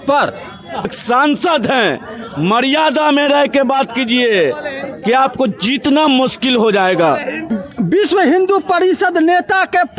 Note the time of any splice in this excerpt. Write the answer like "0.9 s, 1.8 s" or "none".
1.0 s, 7.4 s